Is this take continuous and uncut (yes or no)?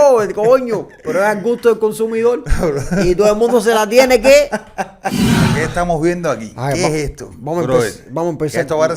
no